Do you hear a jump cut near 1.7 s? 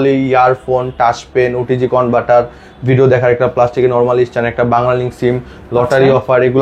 no; 0 cuts

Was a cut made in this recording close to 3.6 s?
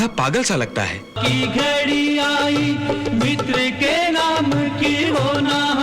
no; 1 cut; at 1.2 s

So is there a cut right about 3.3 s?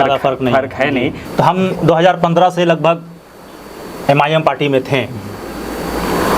no; 1 cut; at 1.2 s

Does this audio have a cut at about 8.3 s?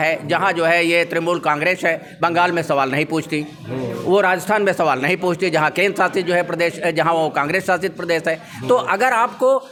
no; 0 cuts

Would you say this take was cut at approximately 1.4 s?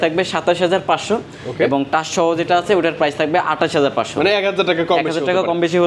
no; 0 cuts

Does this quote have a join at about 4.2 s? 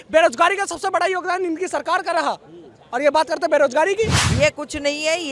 yes; 1 cut; at 4.2 s

